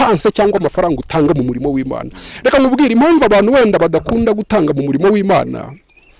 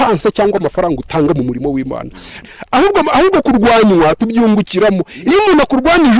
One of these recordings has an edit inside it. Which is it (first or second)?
second